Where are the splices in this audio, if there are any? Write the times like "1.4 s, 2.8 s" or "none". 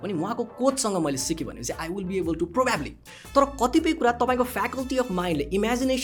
3.1 s